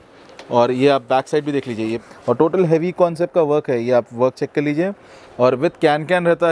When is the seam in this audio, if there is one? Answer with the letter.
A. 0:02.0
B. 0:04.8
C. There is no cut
A